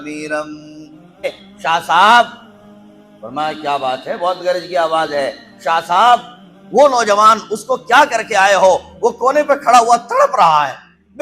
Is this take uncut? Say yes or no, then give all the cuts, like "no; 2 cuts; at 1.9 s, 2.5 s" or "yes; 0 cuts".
no; 1 cut; at 1.2 s